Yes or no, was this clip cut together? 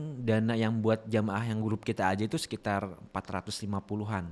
no